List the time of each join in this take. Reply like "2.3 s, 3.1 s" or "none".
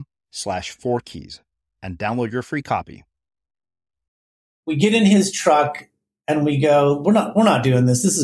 4.6 s

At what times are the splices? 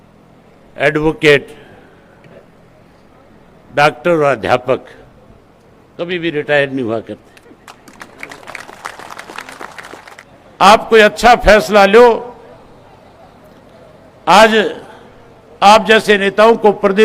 10.1 s

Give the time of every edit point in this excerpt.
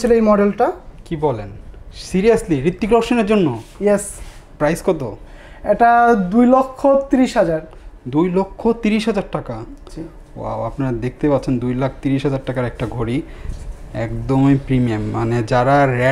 none

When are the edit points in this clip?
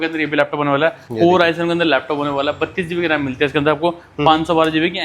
1.0 s

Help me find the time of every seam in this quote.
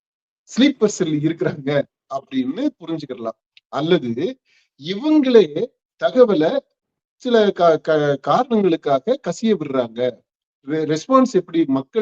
none

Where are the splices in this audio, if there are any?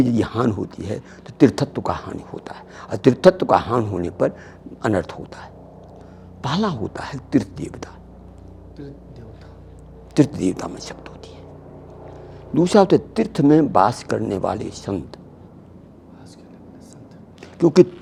none

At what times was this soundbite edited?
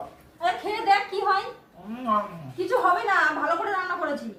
none

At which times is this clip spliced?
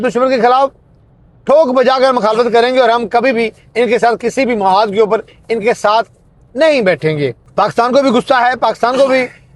7.4 s

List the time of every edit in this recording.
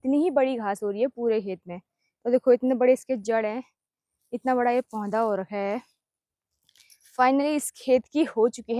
none

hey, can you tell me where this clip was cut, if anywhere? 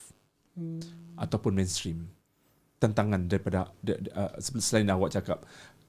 none

